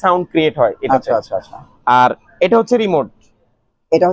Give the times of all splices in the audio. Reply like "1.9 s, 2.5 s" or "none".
none